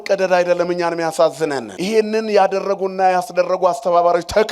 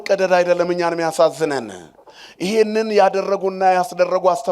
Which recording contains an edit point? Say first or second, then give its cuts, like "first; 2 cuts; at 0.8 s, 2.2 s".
first; 1 cut; at 1.7 s